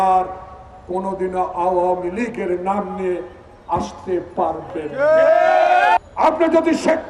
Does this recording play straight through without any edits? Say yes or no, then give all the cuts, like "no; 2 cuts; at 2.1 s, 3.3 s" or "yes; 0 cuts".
no; 1 cut; at 6.0 s